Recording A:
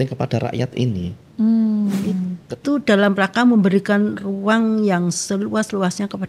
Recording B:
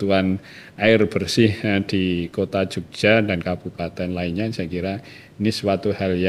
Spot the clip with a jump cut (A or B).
A